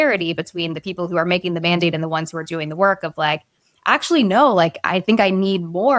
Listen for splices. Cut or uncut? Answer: uncut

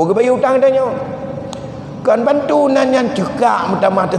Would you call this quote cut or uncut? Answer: uncut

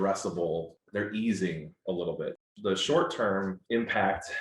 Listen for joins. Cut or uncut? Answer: cut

